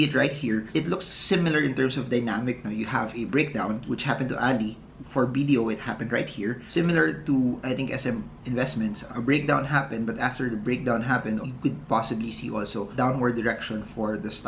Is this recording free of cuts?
no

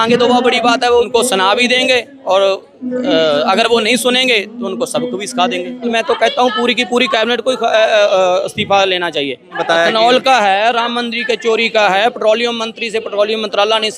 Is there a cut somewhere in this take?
yes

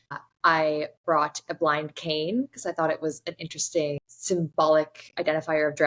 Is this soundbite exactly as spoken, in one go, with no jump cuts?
no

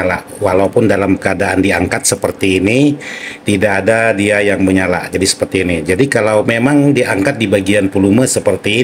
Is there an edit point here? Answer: no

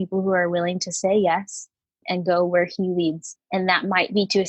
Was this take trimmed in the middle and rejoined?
yes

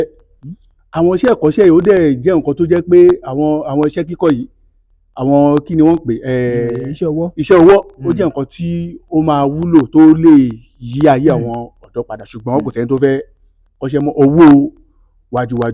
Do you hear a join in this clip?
no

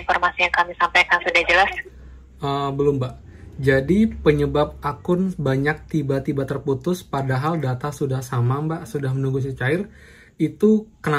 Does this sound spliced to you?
no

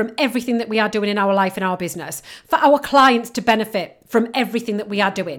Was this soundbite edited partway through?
no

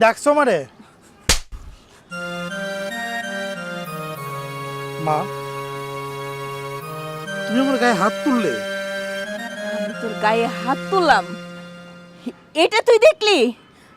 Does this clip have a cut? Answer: no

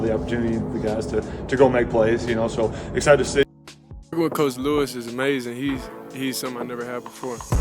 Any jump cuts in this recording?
yes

